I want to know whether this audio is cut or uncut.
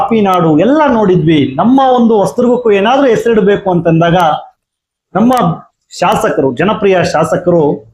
uncut